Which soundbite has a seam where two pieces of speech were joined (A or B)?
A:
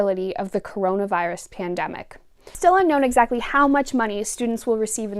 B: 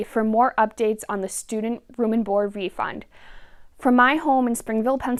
A